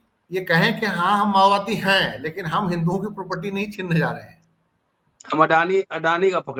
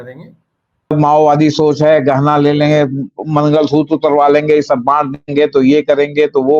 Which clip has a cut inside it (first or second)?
second